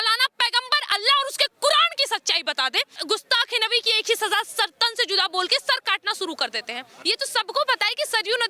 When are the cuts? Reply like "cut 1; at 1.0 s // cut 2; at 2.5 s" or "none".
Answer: cut 1; at 3.0 s // cut 2; at 6.9 s